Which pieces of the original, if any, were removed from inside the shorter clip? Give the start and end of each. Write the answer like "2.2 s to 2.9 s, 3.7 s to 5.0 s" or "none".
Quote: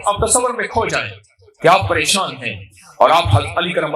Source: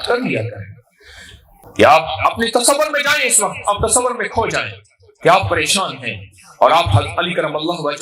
none